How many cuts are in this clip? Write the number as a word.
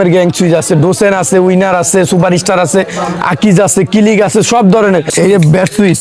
one